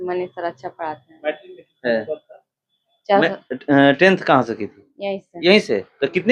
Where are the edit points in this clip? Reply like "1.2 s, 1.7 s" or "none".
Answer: none